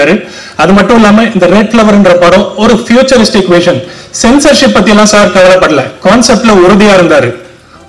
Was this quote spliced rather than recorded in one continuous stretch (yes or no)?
no